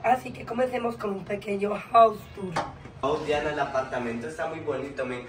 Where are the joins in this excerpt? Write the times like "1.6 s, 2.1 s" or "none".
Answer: 3.0 s